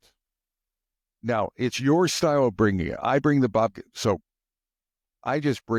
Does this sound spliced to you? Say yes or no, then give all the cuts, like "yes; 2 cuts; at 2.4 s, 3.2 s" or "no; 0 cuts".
no; 0 cuts